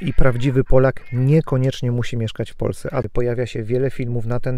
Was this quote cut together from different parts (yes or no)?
yes